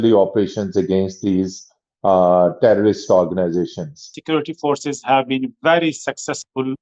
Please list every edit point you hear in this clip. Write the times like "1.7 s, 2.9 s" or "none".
4.1 s